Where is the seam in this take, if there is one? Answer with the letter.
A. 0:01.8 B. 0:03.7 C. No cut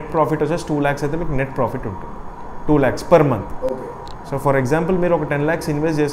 C